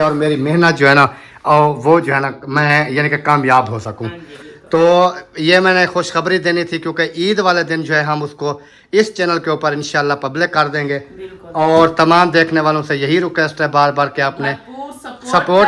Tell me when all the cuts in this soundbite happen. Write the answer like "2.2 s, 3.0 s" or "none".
none

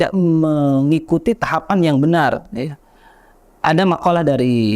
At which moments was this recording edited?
none

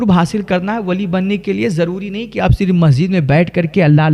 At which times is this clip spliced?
none

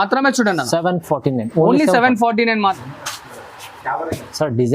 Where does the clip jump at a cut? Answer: 2.8 s

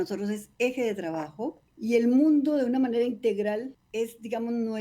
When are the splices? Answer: 1.6 s, 3.8 s

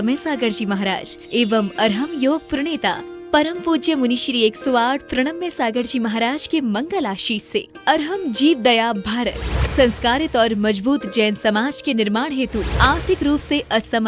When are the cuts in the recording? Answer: none

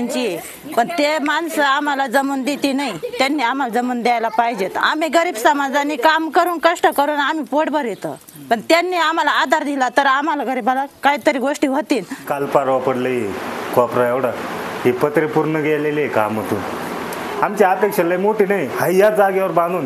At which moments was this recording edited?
4.8 s, 12.2 s, 17.3 s

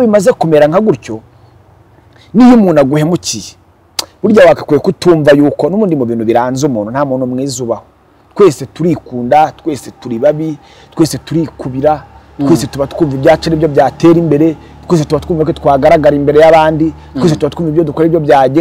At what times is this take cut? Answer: none

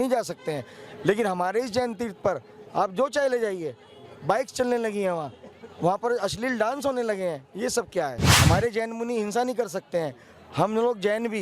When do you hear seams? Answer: 8.2 s

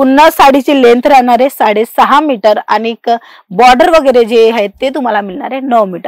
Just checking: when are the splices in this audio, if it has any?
none

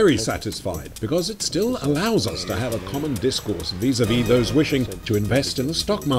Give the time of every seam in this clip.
none

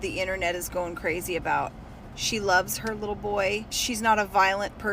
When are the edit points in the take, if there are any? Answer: 3.7 s

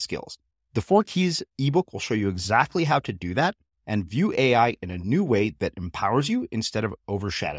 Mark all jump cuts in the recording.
none

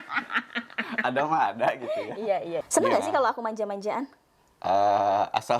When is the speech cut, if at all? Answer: 2.5 s

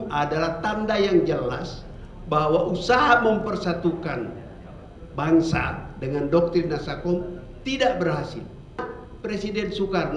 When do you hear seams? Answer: 8.8 s

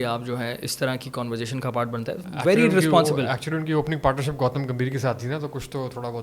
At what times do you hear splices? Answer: 2.3 s

